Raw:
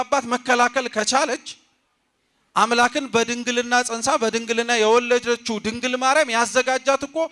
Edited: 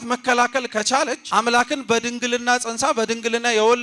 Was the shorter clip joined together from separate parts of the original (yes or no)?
yes